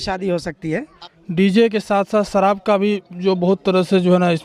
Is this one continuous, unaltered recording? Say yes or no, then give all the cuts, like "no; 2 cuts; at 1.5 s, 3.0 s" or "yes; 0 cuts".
no; 1 cut; at 1.0 s